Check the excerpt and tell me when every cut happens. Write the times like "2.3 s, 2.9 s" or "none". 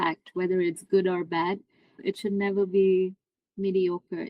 2.0 s

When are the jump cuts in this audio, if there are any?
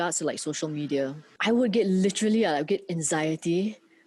1.3 s

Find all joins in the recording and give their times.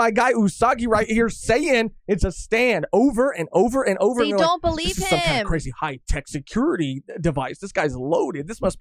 none

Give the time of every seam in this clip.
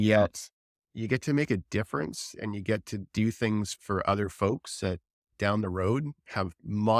3.7 s, 5.3 s

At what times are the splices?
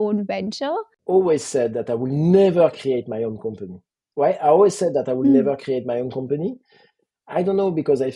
0.9 s

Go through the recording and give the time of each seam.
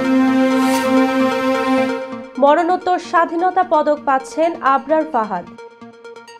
none

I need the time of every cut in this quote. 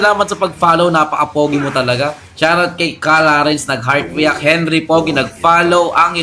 none

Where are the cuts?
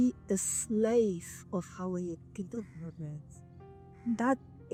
none

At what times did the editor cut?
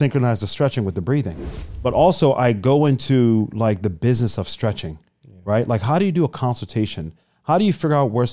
1.6 s

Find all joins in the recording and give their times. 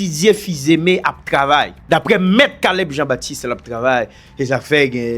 1.8 s

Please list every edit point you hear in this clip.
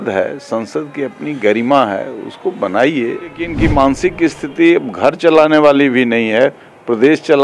3.5 s

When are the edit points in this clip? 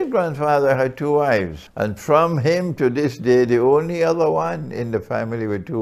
1.6 s

